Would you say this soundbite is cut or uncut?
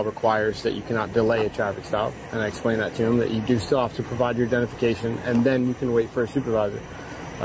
uncut